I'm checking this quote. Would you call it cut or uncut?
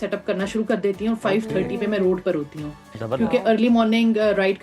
uncut